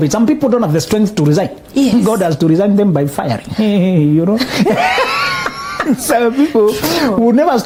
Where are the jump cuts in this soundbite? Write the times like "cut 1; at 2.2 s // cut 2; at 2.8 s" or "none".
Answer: none